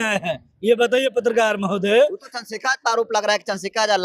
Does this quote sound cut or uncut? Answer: uncut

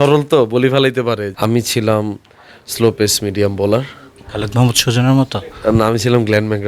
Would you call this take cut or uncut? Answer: cut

